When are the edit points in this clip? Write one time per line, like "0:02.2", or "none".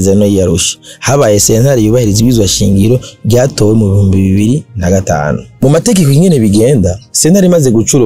0:05.5